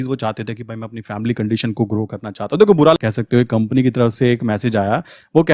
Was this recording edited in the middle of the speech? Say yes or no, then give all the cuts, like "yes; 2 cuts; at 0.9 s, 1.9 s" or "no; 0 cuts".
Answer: yes; 1 cut; at 3.0 s